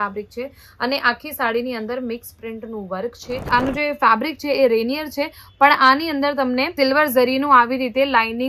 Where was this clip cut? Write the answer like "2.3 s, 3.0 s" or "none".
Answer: 3.5 s